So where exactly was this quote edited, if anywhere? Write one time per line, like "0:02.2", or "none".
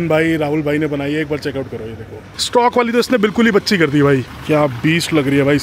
0:02.4
0:04.3